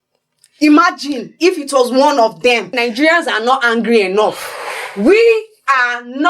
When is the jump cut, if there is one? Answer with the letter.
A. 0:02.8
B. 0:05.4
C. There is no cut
A